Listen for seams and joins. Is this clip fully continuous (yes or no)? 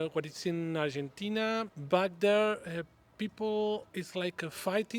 no